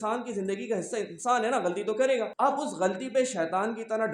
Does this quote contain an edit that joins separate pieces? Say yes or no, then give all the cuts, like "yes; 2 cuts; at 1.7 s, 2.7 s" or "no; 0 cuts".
yes; 1 cut; at 2.3 s